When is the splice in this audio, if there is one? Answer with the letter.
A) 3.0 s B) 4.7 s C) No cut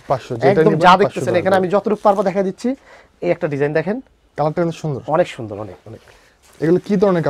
C